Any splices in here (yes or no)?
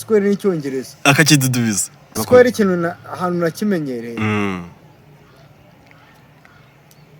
yes